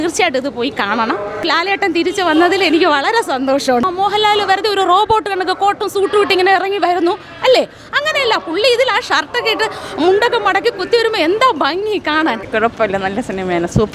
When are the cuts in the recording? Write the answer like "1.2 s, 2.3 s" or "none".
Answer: 1.4 s, 3.8 s, 12.5 s